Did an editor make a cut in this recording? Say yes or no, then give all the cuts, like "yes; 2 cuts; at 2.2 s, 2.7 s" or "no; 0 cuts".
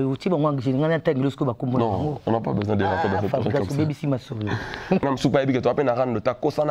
yes; 1 cut; at 5.0 s